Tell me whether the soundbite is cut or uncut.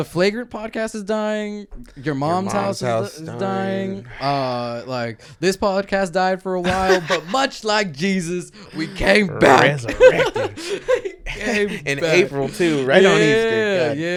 uncut